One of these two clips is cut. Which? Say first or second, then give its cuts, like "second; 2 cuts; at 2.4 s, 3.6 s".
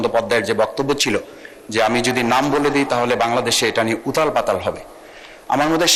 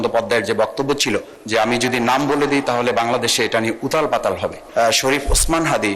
second; 2 cuts; at 1.4 s, 4.6 s